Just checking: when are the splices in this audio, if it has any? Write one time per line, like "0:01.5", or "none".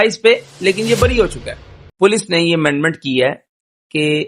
0:01.8